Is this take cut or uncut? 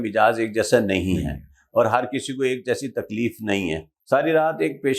cut